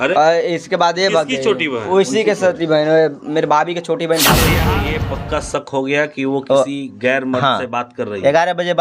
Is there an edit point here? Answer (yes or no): yes